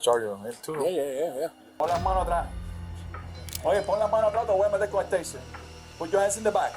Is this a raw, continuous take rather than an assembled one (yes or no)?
no